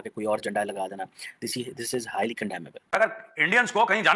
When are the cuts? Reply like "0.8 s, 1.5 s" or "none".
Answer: 2.9 s